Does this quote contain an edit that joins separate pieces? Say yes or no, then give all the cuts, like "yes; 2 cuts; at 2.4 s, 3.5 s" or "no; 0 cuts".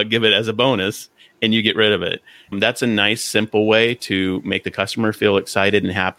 yes; 1 cut; at 2.5 s